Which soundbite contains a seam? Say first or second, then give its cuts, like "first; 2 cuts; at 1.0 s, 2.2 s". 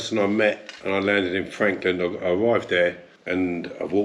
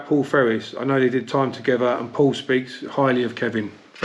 first; 1 cut; at 3.1 s